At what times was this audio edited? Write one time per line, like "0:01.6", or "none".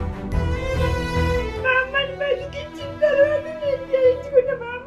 0:01.5